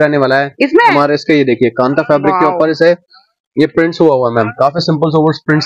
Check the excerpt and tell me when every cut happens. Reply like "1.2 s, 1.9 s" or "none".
0.9 s